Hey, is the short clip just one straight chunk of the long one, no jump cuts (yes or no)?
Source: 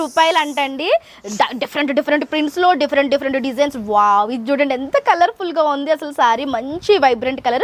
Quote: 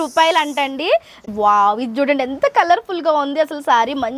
no